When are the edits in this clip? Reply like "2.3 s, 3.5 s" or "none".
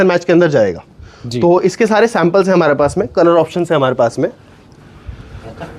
none